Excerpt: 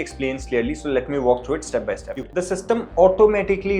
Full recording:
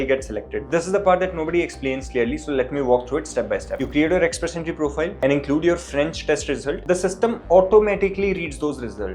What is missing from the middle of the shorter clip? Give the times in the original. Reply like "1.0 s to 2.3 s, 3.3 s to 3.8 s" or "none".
3.9 s to 6.8 s